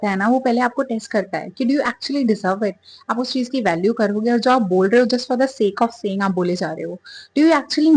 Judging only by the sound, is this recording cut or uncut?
uncut